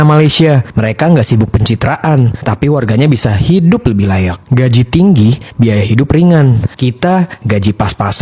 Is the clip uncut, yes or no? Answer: yes